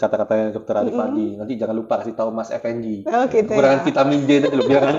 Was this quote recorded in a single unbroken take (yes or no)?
yes